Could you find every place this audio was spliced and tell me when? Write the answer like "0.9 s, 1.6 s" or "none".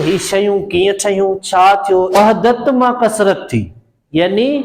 2.1 s